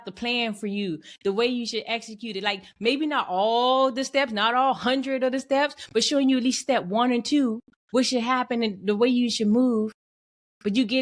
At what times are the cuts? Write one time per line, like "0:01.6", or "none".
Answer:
none